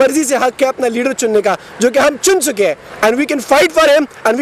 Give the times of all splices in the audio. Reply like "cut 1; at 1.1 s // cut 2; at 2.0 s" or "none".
none